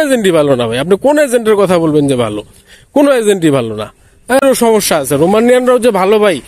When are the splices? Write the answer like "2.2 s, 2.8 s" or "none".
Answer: 4.4 s